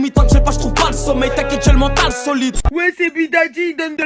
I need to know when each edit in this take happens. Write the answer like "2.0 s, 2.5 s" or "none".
2.5 s